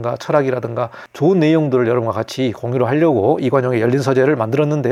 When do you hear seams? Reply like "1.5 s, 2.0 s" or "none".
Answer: none